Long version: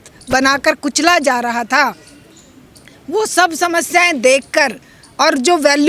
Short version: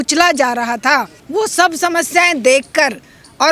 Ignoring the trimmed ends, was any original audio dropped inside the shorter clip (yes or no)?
yes